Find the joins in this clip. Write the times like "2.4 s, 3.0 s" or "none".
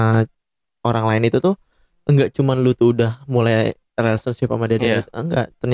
none